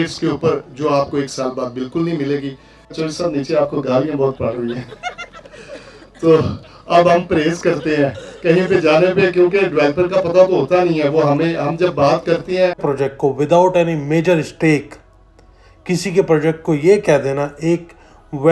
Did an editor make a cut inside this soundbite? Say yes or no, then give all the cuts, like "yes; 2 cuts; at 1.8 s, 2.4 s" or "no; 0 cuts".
yes; 2 cuts; at 2.9 s, 12.8 s